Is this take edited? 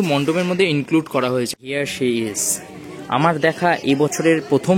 yes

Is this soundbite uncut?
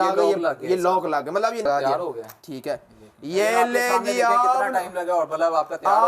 no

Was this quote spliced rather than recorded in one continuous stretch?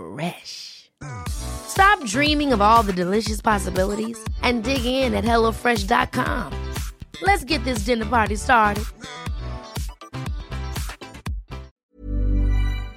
yes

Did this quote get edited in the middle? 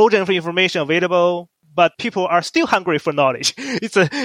yes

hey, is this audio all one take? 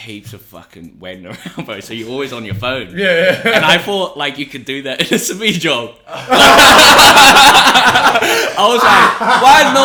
yes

